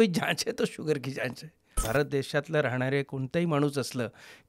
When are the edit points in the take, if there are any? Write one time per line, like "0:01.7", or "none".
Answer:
0:01.8

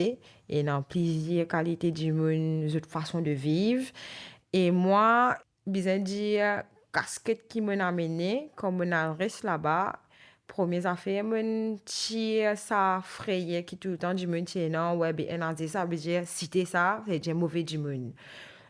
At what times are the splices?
0:05.4

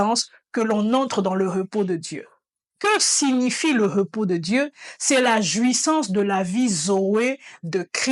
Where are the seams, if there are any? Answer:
none

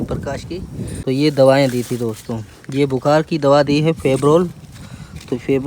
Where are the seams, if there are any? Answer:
0:00.9

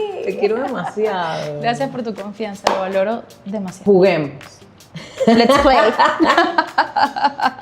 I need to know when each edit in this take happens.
0:03.7

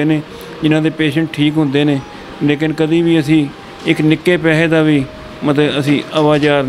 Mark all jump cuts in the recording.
none

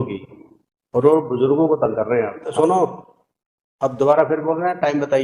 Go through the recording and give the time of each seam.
0:02.5

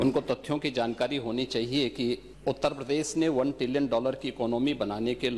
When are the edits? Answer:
0:02.3

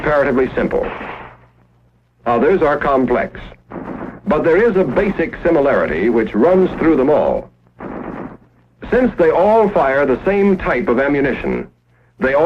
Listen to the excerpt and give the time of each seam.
0:04.5

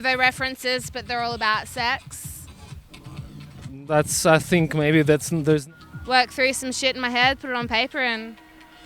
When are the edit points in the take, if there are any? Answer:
0:05.6

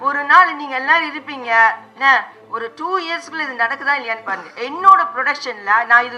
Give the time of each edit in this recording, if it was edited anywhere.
none

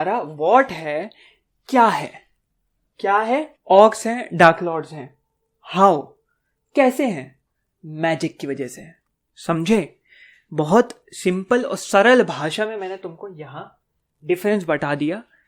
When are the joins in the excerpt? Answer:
0:03.6

